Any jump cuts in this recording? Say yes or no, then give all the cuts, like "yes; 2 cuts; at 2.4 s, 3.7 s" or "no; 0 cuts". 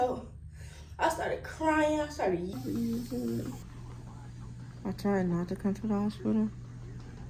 yes; 1 cut; at 2.5 s